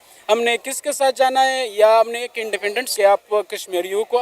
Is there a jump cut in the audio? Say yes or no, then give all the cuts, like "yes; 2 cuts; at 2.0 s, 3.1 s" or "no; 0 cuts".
yes; 1 cut; at 2.9 s